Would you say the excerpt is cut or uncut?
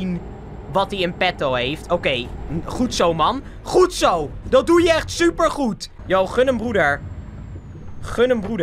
uncut